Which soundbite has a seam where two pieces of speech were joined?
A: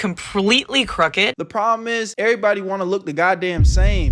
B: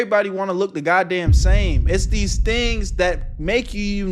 A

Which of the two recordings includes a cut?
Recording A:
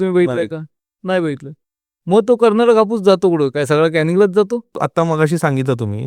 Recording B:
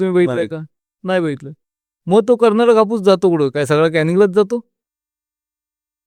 A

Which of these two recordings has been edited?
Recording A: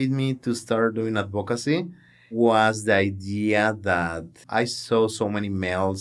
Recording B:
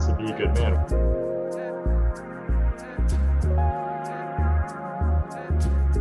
A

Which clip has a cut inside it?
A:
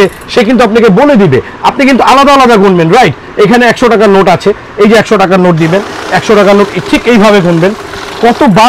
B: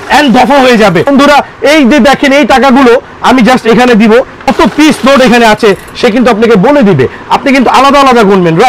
B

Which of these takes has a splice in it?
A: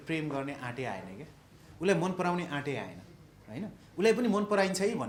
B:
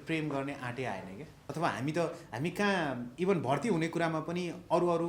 B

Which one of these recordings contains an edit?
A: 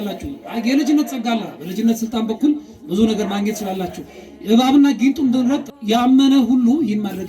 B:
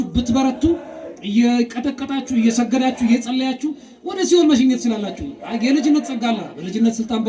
A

